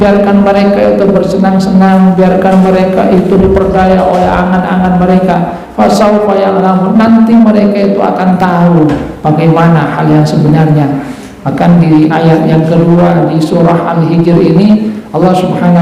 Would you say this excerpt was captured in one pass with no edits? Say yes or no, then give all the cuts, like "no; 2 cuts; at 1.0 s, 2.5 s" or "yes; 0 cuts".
yes; 0 cuts